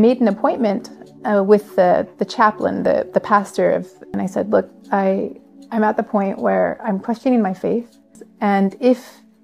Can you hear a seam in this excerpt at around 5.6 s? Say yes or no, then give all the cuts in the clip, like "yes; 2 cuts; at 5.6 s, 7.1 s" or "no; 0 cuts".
no; 2 cuts; at 4.1 s, 8.2 s